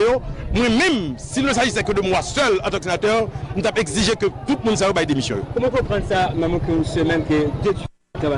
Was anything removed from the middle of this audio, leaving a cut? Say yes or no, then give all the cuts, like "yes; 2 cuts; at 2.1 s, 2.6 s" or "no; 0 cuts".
yes; 1 cut; at 2.8 s